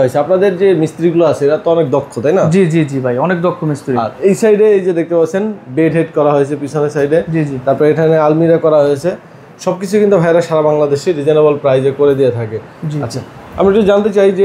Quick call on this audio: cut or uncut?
uncut